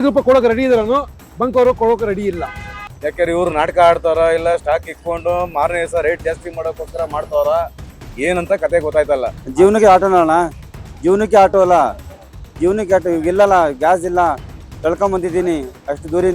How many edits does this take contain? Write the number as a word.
two